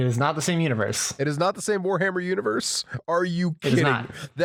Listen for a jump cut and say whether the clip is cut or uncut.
uncut